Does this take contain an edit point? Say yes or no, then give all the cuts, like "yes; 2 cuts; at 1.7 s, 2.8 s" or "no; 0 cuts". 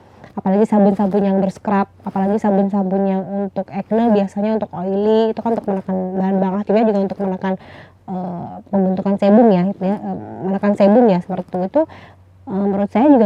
no; 0 cuts